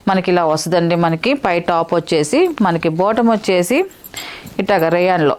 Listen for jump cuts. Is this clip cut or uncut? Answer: uncut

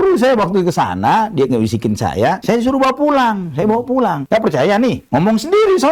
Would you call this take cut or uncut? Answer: uncut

